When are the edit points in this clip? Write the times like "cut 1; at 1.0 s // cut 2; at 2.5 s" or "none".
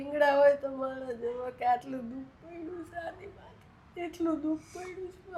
none